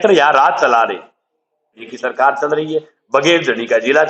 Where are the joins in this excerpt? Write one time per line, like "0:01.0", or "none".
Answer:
0:01.9